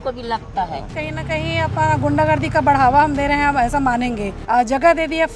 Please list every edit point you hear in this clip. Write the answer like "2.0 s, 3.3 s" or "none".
0.9 s, 4.3 s